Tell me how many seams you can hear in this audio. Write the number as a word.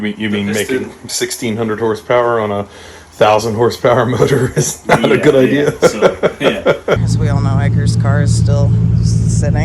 one